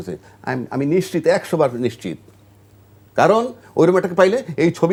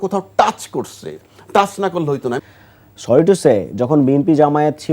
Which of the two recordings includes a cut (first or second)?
second